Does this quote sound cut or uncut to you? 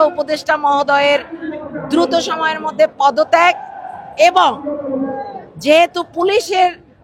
uncut